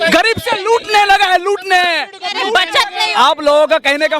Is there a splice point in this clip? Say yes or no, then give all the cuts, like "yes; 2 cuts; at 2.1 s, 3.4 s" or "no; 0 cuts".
yes; 1 cut; at 3.1 s